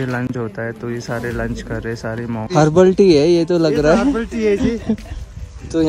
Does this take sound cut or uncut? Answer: cut